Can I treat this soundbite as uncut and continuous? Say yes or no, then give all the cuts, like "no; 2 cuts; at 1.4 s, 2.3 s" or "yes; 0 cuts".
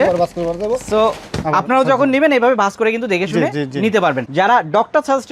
no; 1 cut; at 4.3 s